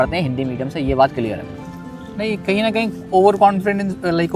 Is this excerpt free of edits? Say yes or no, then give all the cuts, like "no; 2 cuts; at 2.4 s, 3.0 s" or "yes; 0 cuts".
yes; 0 cuts